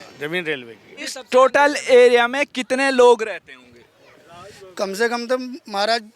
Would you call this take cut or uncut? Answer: cut